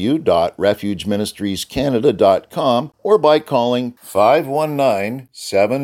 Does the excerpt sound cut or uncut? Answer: cut